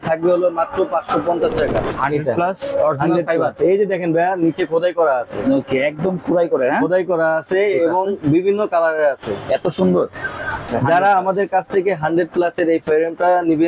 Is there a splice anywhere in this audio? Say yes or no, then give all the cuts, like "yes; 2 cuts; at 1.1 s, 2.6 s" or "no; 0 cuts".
yes; 2 cuts; at 1.9 s, 10.7 s